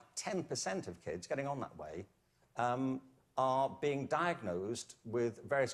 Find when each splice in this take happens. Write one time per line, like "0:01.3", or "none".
0:03.3